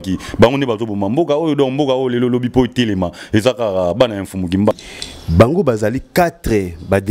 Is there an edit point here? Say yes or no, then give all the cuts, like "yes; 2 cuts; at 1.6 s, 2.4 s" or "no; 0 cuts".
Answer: yes; 1 cut; at 4.8 s